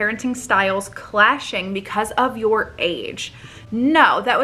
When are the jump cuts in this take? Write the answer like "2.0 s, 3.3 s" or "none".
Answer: none